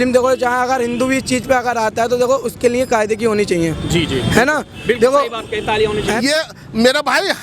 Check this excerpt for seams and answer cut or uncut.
cut